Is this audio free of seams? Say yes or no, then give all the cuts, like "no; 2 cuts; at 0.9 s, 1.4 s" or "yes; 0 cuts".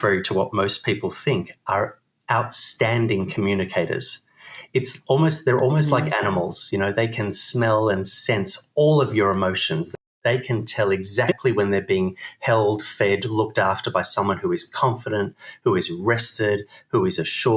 no; 1 cut; at 10.1 s